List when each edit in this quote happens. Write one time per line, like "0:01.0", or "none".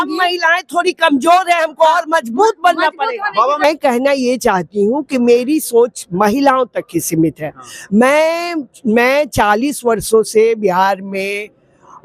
0:03.6